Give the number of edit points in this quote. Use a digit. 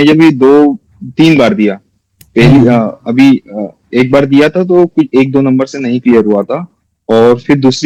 0